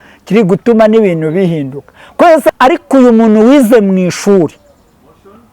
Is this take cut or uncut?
cut